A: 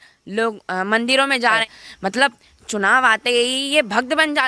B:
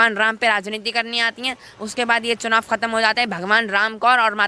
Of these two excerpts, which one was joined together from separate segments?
A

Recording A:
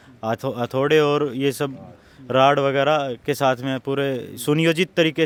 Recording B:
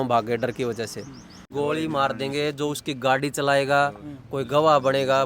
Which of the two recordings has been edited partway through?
B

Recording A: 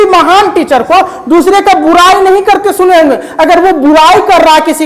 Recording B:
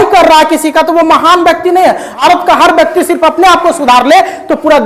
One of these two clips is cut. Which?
B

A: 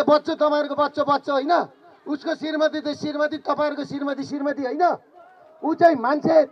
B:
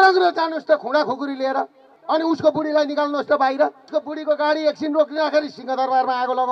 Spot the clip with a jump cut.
B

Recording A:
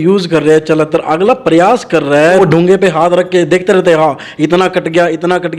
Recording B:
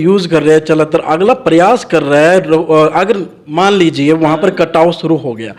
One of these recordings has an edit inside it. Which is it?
A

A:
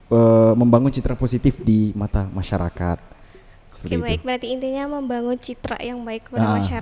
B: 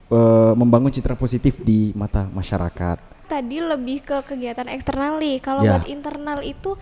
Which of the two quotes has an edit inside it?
B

